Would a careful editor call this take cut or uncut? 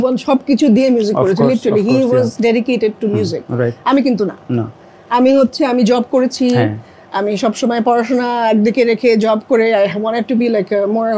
uncut